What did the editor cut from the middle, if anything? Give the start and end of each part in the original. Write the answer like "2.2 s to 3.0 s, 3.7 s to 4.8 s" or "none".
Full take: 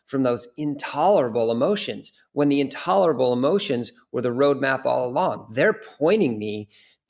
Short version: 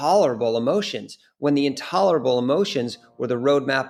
none